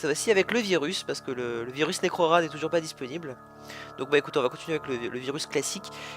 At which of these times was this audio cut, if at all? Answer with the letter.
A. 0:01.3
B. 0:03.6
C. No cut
B